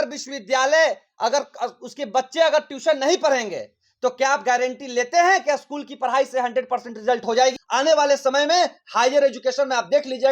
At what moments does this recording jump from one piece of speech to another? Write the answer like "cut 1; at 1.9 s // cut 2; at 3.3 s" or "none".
cut 1; at 7.6 s